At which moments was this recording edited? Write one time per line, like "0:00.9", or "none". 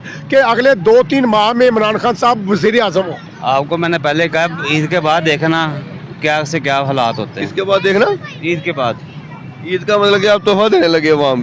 none